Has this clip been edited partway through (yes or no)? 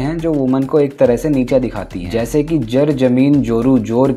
no